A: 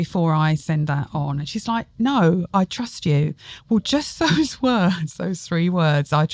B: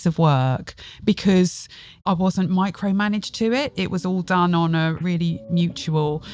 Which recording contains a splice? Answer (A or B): B